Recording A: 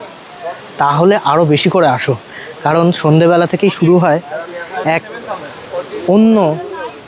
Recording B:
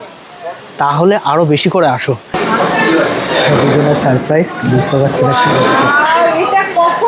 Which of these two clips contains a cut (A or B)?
B